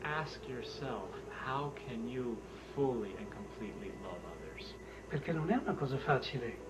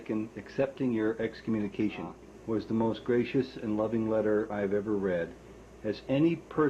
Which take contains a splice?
second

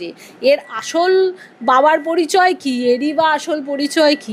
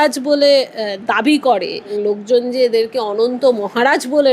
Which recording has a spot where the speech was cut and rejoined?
second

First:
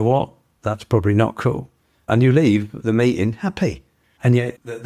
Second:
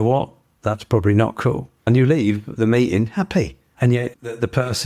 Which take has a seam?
second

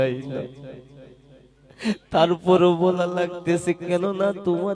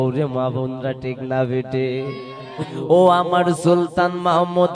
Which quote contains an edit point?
second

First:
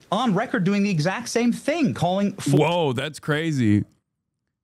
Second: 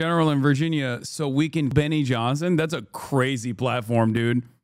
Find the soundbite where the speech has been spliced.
second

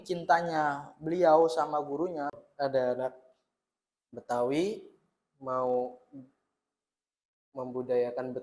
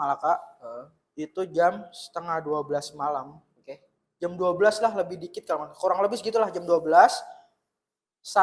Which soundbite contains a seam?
first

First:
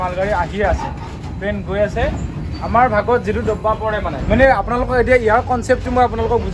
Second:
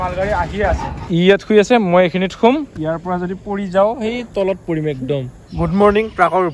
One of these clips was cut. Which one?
second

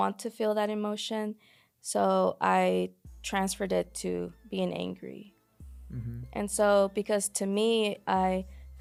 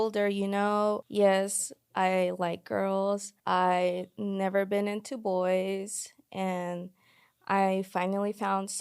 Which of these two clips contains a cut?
second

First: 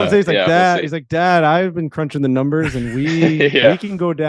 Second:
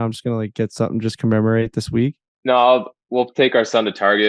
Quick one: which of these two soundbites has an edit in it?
second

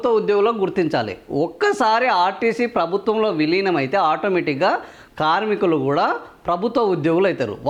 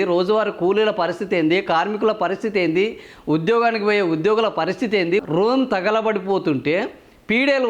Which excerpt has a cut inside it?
second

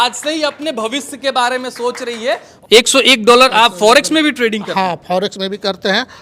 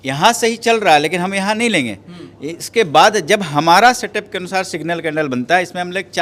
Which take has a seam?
first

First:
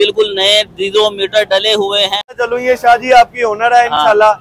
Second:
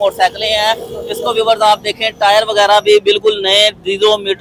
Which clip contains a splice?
first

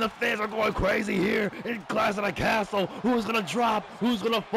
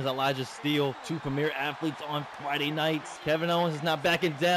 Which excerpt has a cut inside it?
second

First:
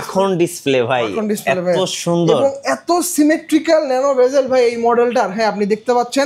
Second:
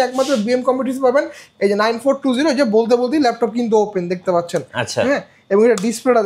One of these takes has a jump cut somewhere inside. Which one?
second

